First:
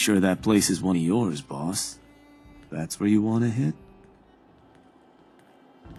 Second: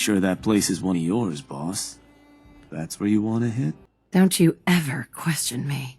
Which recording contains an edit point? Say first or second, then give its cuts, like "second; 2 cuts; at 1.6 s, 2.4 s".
second; 1 cut; at 3.9 s